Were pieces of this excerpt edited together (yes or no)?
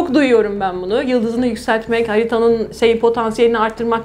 no